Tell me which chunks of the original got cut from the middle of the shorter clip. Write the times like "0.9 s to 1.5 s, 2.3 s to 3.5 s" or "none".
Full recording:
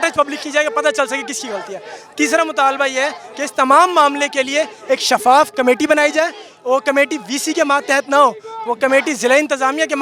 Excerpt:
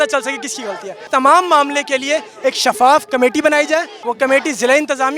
1.8 s to 3.4 s, 6.4 s to 8.6 s